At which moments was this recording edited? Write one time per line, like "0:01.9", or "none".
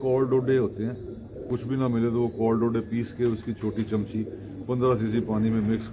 0:01.5